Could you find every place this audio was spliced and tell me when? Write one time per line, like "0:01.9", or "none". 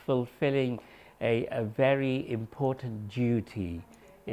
none